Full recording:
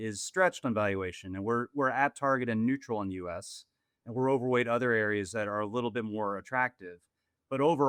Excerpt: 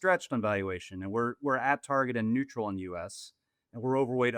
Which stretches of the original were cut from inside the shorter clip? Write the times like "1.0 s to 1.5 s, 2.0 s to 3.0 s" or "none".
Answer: none